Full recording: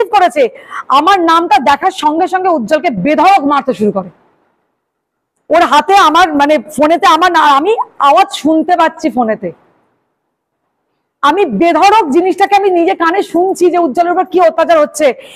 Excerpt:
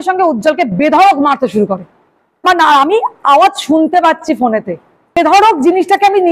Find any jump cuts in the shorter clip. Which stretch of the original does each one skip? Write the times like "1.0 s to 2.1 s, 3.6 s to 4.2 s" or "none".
4.7 s to 7.2 s, 9.9 s to 11.7 s